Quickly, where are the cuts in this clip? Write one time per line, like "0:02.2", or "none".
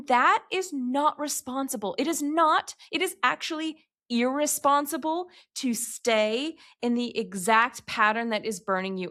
none